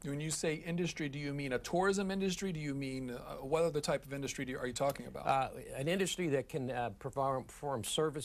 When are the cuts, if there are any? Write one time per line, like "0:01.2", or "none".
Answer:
0:03.8